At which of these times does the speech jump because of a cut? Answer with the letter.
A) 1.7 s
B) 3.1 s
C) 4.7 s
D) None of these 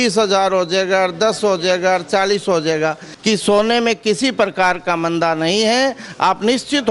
B